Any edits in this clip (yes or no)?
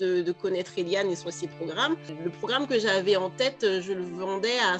no